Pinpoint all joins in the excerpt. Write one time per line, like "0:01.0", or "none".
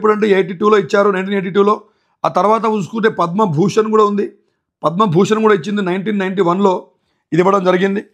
none